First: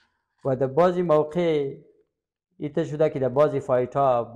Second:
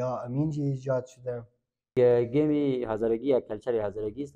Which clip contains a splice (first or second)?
second